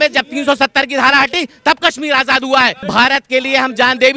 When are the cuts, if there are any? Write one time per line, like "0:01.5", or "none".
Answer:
0:02.8